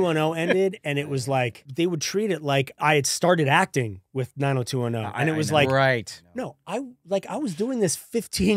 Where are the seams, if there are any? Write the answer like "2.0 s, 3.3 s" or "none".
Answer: 1.6 s, 2.7 s